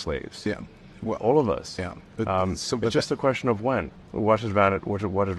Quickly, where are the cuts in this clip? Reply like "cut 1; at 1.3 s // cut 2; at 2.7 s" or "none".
cut 1; at 4.0 s